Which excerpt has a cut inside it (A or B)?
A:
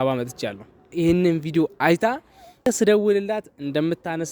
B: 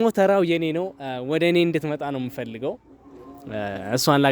A